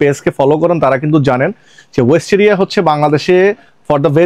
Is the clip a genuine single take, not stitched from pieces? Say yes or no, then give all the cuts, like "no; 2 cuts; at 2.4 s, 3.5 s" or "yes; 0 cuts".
yes; 0 cuts